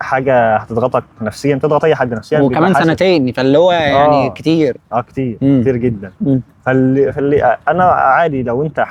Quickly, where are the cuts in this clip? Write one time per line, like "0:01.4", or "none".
none